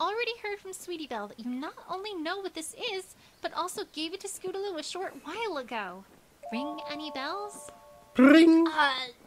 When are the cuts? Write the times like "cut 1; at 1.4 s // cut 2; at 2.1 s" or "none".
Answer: cut 1; at 4.6 s